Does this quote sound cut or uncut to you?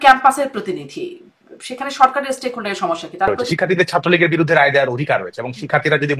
cut